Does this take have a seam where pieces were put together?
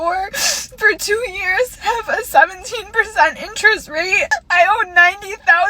yes; 1 cut; at 4.4 s

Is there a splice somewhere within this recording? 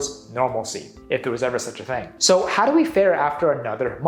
no; 0 cuts

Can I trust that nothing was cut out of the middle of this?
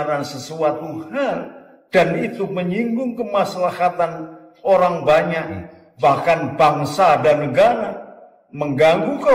yes; 0 cuts

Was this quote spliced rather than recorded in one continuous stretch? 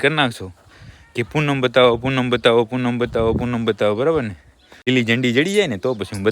yes; 1 cut; at 4.9 s

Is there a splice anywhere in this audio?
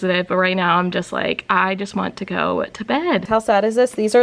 yes; 1 cut; at 3.3 s

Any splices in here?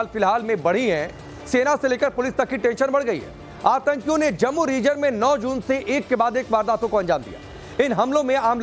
no; 0 cuts

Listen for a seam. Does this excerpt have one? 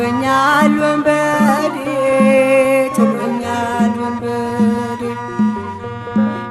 no; 0 cuts

